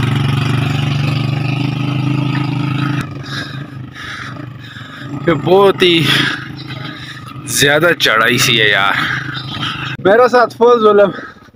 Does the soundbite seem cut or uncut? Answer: uncut